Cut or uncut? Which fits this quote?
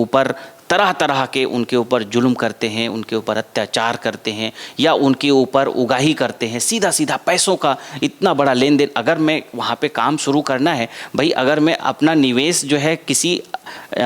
uncut